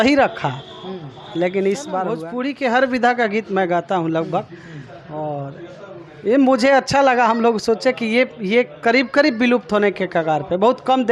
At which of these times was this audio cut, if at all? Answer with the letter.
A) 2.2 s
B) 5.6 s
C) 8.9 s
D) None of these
A